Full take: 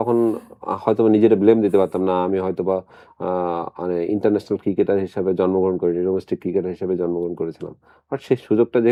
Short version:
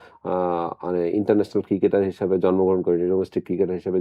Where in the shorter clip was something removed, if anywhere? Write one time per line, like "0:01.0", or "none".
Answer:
none